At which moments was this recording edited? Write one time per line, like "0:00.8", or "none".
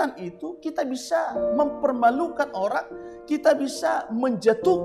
none